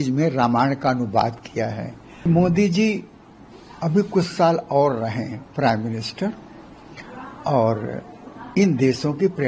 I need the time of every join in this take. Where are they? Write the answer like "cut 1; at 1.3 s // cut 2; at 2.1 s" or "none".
cut 1; at 2.3 s